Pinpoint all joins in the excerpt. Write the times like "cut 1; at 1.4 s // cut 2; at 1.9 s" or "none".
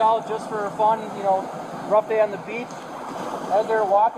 none